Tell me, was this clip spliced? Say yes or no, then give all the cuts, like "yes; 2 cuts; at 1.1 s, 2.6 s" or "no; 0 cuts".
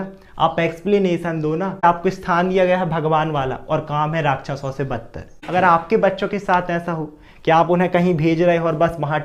yes; 2 cuts; at 1.8 s, 5.4 s